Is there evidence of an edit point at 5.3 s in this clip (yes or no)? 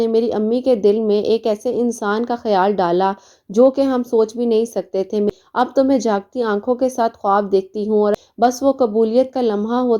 yes